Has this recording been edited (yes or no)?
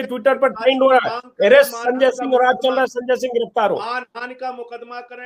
no